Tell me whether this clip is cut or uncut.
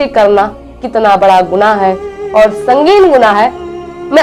uncut